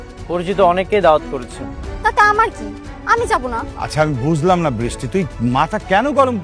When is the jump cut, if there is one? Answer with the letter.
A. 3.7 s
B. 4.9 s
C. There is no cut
A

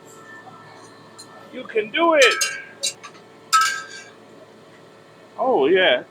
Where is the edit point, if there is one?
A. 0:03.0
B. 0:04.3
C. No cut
A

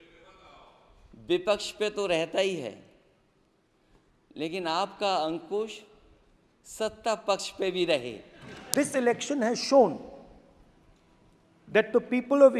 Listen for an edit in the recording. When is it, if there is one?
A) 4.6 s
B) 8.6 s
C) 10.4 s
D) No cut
B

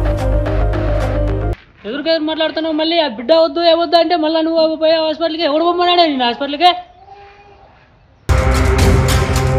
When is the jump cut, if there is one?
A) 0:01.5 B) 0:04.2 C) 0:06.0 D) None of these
A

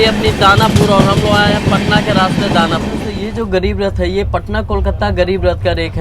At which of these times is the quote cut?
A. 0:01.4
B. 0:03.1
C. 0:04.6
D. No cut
B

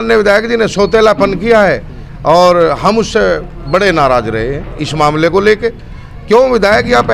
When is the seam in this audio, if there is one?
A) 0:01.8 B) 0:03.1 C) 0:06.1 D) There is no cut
D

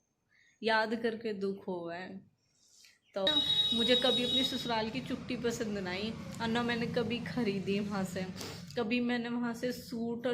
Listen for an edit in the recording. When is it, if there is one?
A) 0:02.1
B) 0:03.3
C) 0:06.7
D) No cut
B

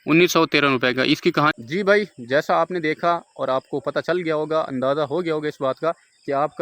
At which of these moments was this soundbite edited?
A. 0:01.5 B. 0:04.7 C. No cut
A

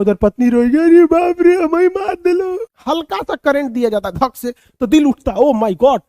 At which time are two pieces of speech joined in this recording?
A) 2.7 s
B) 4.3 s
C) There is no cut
A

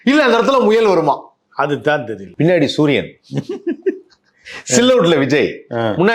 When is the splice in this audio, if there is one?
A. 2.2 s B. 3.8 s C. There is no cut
A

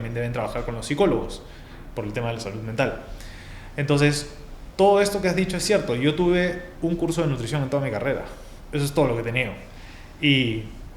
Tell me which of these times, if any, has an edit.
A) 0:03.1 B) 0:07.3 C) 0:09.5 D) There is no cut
D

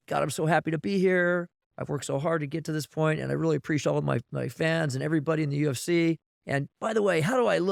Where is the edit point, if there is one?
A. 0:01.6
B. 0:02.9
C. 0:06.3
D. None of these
D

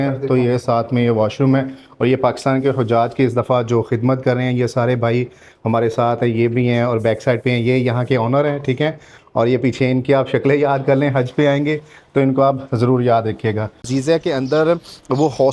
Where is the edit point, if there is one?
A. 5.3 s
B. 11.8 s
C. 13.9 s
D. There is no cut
C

